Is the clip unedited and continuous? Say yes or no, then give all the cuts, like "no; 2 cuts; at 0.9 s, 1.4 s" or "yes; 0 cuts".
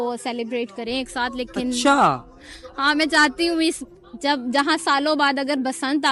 yes; 0 cuts